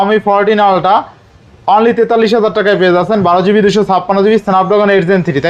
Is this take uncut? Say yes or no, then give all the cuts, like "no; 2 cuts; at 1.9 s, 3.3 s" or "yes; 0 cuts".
yes; 0 cuts